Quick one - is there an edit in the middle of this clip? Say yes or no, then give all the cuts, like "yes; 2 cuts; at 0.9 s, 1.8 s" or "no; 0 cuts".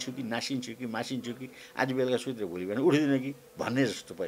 no; 0 cuts